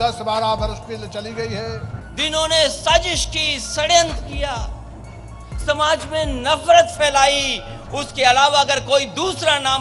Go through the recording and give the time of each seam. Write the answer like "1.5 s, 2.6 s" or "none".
2.0 s